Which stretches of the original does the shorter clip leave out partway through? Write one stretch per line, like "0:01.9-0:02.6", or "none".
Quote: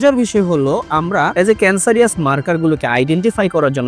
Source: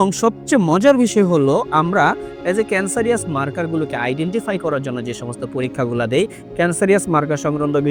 0:02.1-0:02.4

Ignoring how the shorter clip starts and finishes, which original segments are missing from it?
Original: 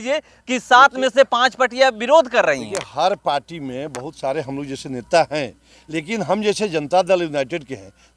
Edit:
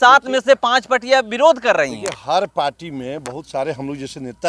none

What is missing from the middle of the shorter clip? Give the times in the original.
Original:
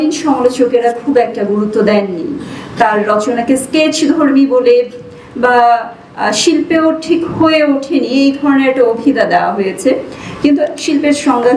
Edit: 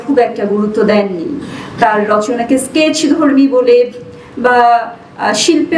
none

